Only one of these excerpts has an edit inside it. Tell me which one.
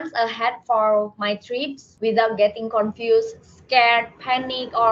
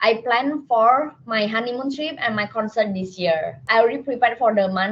second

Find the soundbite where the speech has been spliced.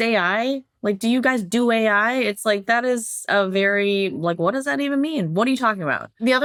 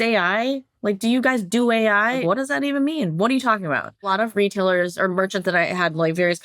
second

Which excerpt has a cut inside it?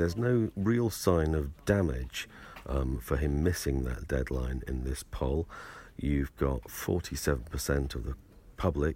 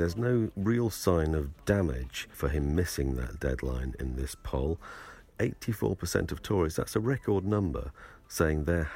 second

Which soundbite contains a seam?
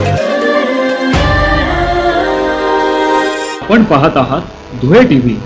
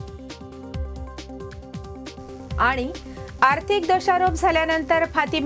second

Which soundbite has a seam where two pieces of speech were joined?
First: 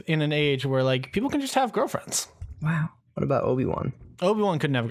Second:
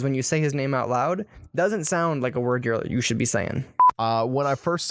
second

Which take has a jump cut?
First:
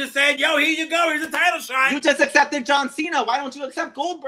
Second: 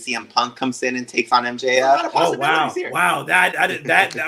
second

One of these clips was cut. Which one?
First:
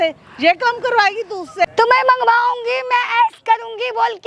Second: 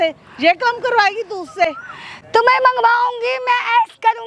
first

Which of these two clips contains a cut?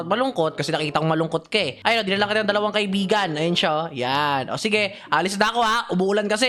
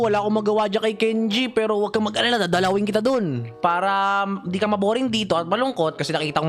second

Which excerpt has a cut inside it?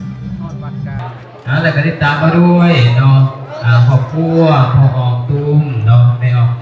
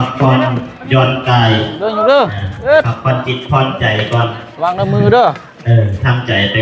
first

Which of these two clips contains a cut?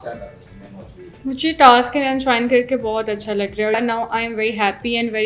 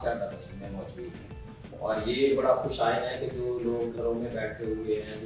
first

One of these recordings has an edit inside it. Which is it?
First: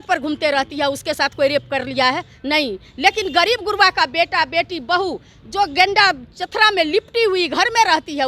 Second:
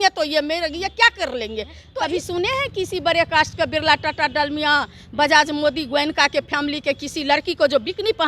second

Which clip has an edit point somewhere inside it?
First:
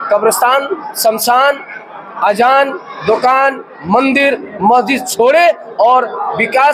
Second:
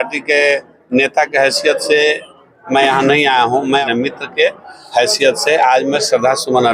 second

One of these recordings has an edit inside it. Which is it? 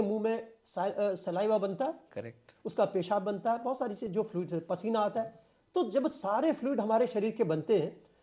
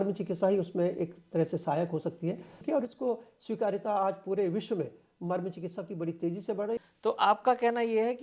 second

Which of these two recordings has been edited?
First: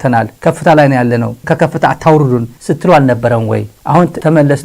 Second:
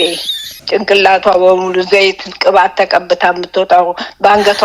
first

